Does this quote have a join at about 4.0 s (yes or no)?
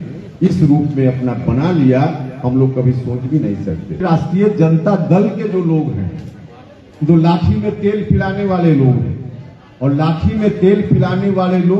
yes